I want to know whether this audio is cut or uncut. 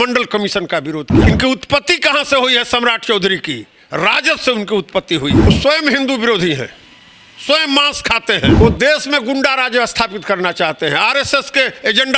cut